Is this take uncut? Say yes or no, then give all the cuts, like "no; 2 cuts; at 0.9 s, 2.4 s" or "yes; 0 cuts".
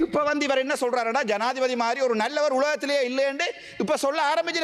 yes; 0 cuts